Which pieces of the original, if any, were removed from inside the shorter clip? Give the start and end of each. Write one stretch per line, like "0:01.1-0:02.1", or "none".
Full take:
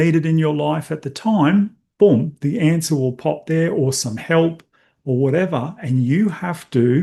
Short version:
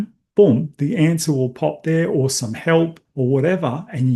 0:04.7-0:04.9